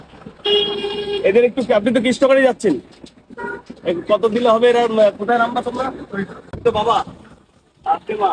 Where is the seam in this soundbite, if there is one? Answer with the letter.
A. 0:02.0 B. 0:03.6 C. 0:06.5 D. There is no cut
C